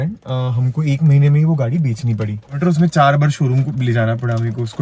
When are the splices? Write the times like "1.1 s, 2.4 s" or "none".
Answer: 2.6 s